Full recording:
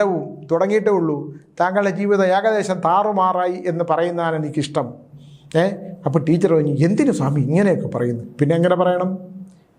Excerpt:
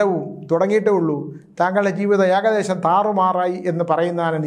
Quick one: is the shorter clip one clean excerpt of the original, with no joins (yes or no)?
yes